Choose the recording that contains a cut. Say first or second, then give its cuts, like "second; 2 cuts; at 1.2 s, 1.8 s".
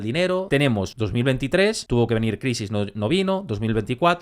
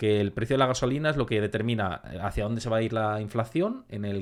first; 2 cuts; at 0.9 s, 1.8 s